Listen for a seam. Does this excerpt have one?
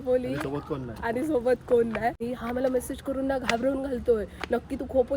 yes; 1 cut; at 2.2 s

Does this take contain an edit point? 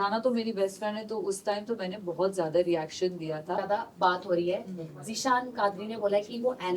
yes; 1 cut; at 3.6 s

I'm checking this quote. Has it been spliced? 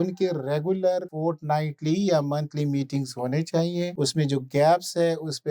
yes; 2 cuts; at 1.1 s, 3.9 s

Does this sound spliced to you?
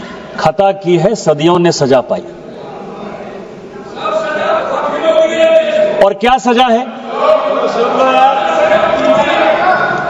no; 0 cuts

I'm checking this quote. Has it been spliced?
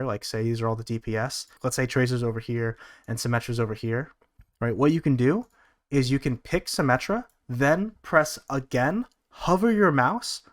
yes; 2 cuts; at 1.5 s, 7.4 s

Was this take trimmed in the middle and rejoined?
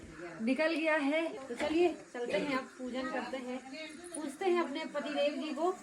yes; 1 cut; at 1.4 s

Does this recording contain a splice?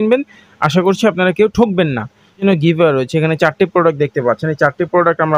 yes; 1 cut; at 2.4 s

